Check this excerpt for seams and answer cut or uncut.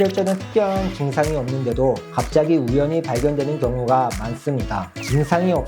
cut